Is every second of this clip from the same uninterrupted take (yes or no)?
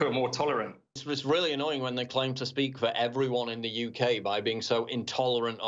no